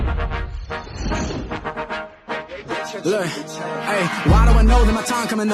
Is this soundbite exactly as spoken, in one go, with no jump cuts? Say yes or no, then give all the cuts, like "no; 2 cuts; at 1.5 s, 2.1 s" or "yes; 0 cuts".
no; 1 cut; at 4.3 s